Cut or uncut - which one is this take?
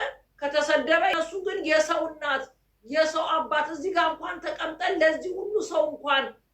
cut